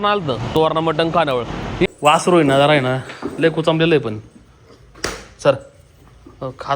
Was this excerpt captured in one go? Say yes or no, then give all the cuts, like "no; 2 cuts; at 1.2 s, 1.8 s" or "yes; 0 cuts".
no; 1 cut; at 1.9 s